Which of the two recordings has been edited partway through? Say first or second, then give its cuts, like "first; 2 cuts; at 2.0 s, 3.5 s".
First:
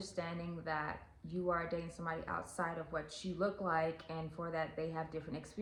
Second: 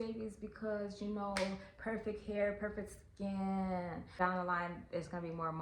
second; 1 cut; at 4.0 s